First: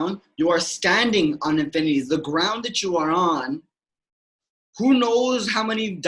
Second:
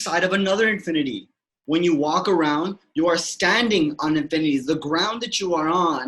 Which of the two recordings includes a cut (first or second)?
second